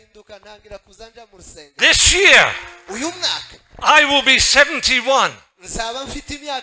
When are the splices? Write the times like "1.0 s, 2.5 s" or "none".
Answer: 1.8 s